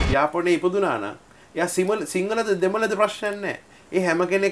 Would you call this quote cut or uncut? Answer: uncut